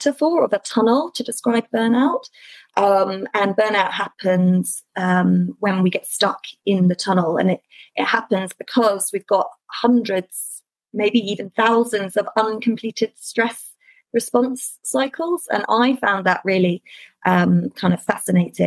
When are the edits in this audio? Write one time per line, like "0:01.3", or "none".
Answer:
none